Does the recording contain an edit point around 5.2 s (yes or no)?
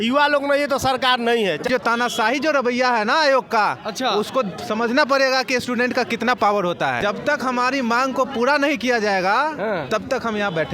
no